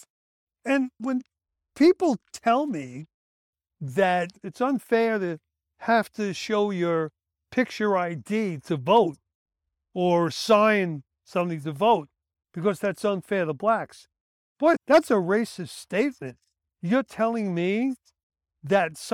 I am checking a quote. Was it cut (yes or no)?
no